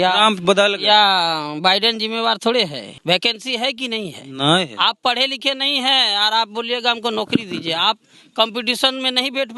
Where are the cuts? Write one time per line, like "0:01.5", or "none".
0:02.9

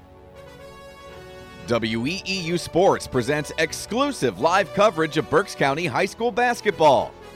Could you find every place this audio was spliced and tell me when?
0:01.6

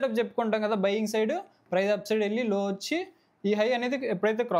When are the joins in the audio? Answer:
none

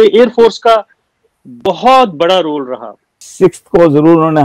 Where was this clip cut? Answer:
0:03.2

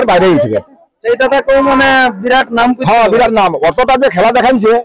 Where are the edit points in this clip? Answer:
0:01.0

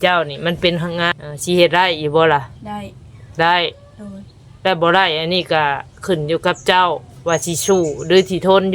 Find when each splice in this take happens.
0:01.1

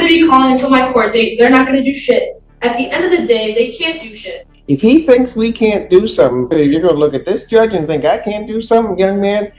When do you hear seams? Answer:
0:04.5
0:06.5

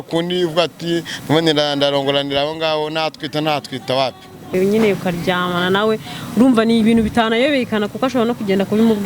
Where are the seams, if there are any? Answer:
0:04.5

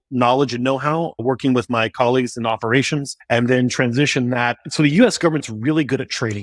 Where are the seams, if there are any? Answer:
0:01.2
0:03.1
0:04.6

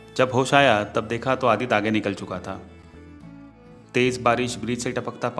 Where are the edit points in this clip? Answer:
none

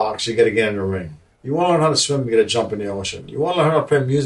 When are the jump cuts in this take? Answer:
0:01.2

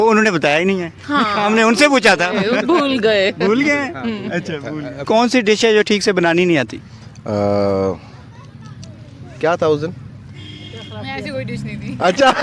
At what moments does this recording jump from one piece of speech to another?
0:05.1

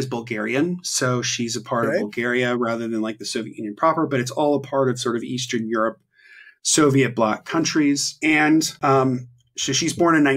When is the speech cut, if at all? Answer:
0:08.1
0:08.7

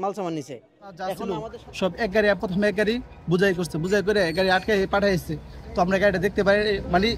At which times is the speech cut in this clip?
0:01.2

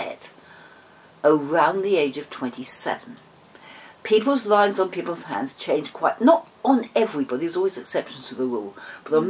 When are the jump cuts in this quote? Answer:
none

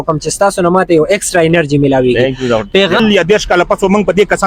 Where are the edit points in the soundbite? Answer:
0:03.0

